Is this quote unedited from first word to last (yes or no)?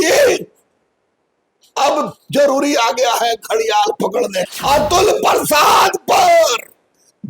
no